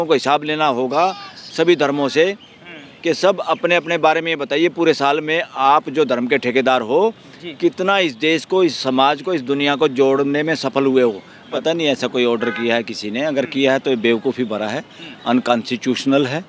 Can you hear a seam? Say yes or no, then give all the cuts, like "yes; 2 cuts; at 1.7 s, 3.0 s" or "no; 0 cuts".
yes; 1 cut; at 11.6 s